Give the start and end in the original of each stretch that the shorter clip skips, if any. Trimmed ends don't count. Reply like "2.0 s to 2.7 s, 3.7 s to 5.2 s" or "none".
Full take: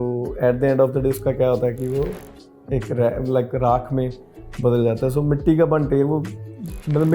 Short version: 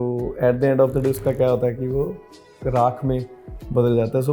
2.6 s to 3.5 s